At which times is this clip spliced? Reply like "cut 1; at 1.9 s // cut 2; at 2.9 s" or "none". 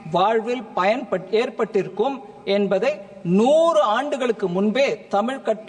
none